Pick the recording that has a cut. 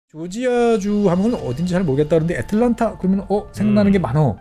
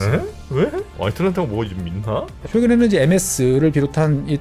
second; 2 cuts; at 0.9 s, 2.4 s

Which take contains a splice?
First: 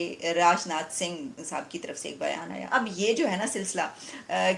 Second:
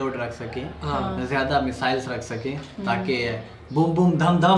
first; 1 cut; at 2.6 s

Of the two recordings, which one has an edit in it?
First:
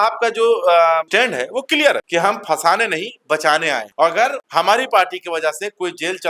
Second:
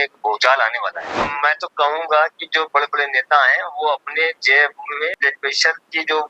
second; 2 cuts; at 1.1 s, 5.1 s

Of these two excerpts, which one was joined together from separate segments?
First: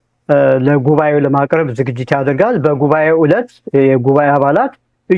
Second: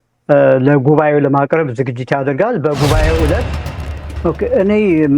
second; 1 cut; at 3.6 s

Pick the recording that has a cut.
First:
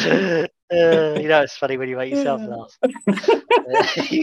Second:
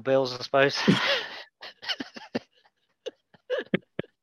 second; 1 cut; at 3.3 s

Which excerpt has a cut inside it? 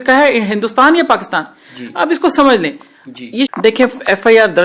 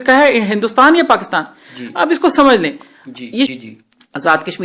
first; 1 cut; at 3.5 s

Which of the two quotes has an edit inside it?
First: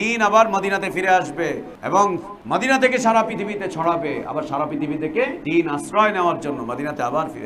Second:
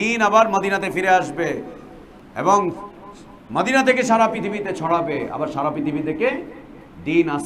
first; 3 cuts; at 1.7 s, 2.3 s, 5.4 s

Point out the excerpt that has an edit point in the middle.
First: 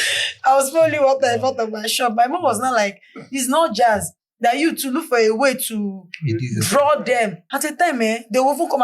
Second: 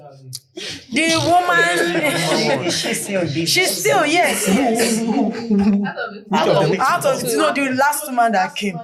first; 1 cut; at 7.4 s

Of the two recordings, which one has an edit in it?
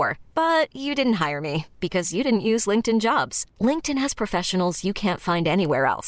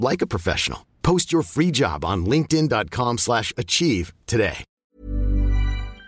second; 1 cut; at 4.7 s

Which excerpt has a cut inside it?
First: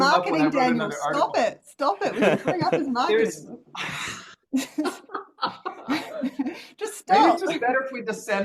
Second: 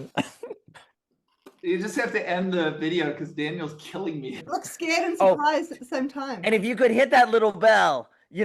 second; 1 cut; at 4.4 s

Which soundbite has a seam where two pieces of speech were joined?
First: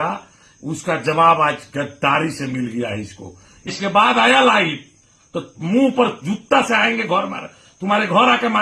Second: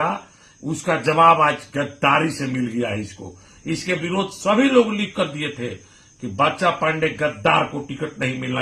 first; 1 cut; at 3.7 s

